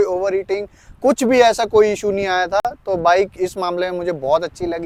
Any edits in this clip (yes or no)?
no